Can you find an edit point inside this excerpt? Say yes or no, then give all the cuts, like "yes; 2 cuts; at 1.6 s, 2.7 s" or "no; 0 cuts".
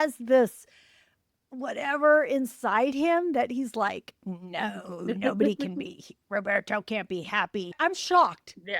yes; 1 cut; at 7.7 s